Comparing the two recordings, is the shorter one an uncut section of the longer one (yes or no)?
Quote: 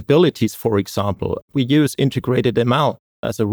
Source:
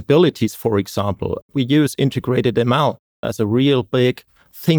yes